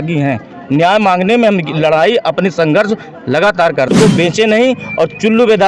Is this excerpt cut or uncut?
cut